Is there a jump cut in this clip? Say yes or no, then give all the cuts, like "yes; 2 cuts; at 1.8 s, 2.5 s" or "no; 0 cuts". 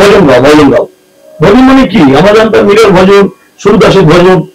no; 0 cuts